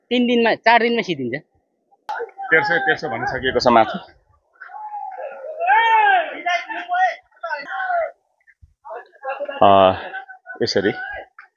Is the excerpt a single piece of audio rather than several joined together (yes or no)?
no